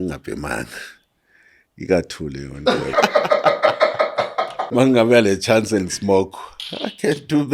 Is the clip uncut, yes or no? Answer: no